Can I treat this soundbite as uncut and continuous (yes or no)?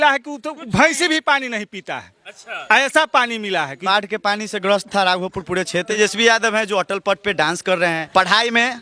no